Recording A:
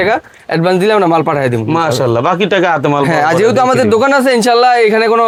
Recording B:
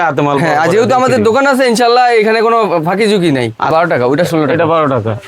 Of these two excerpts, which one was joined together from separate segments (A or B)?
B